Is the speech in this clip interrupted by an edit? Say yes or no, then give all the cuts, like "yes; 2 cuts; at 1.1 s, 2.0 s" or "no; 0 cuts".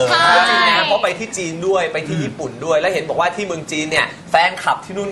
yes; 1 cut; at 2.8 s